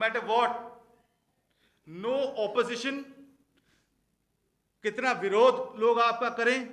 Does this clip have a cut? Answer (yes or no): no